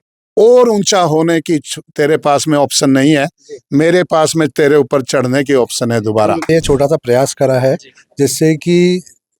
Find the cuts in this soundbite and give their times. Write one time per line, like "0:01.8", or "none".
0:06.5